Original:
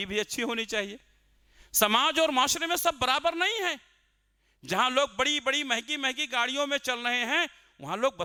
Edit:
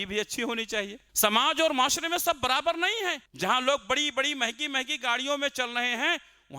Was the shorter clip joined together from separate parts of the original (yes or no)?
yes